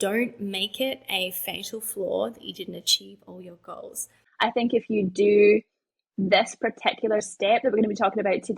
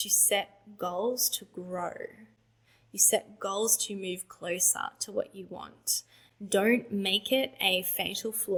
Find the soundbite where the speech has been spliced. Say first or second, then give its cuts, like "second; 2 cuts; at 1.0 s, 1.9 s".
first; 1 cut; at 4.2 s